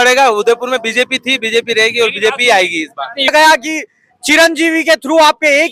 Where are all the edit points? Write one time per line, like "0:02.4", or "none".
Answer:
0:03.3